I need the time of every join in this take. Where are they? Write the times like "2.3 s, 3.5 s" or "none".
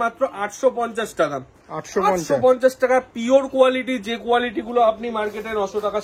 none